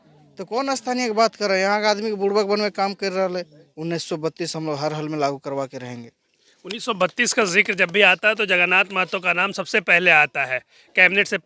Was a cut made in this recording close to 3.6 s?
yes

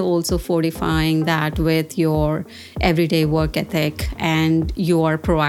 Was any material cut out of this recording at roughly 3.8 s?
no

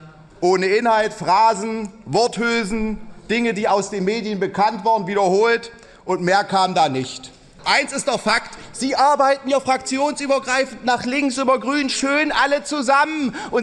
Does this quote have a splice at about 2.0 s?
no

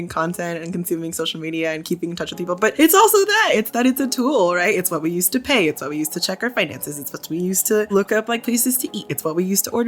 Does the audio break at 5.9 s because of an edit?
no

